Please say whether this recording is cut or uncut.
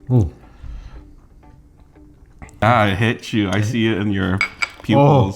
cut